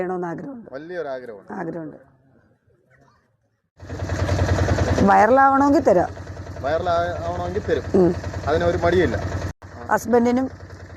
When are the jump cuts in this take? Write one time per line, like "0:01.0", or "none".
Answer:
0:09.5